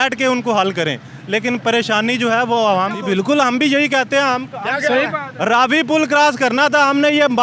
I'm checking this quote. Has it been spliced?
no; 0 cuts

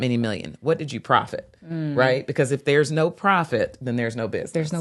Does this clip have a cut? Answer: no; 0 cuts

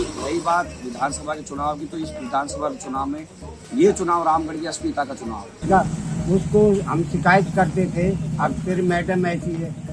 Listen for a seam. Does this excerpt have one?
yes; 1 cut; at 5.6 s

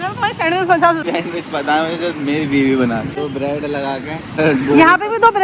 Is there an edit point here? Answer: yes; 3 cuts; at 1.0 s, 3.3 s, 4.4 s

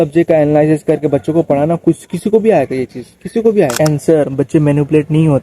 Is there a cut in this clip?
yes; 1 cut; at 3.9 s

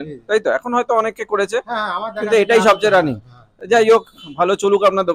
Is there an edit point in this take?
no; 0 cuts

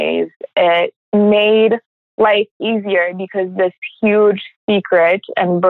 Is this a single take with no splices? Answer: no; 2 cuts; at 1.0 s, 2.0 s

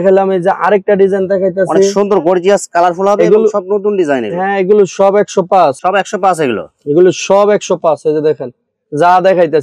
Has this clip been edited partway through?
no; 0 cuts

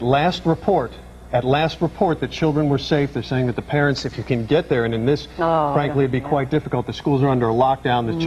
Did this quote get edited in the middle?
no; 0 cuts

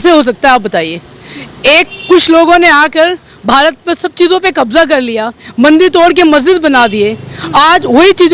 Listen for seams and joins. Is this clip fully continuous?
yes; 0 cuts

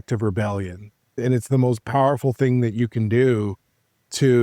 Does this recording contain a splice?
yes; 1 cut; at 1.1 s

